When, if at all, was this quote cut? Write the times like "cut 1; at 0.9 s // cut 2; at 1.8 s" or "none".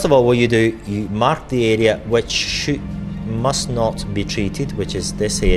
none